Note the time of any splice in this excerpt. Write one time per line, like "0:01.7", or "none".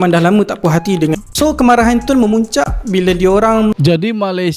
0:01.2
0:03.8